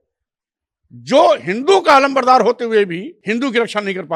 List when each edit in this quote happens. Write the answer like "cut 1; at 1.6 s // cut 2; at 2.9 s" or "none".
cut 1; at 3.1 s